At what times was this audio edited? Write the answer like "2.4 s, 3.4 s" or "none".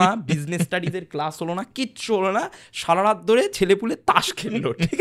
none